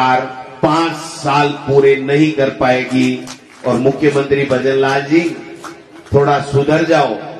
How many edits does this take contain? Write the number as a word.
one